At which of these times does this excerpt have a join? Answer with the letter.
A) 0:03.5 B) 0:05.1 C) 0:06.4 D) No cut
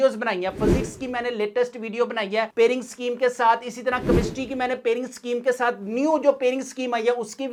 D